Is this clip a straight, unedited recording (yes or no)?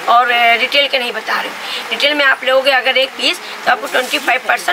yes